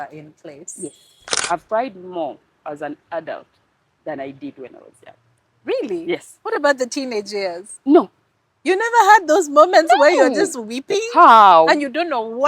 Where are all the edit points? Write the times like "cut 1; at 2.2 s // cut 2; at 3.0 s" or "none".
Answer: cut 1; at 1.3 s